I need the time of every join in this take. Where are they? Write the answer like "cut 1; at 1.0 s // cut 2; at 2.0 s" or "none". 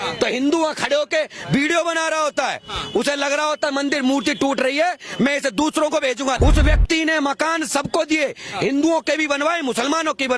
cut 1; at 6.4 s